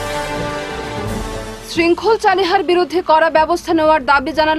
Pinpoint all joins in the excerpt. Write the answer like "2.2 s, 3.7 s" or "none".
1.2 s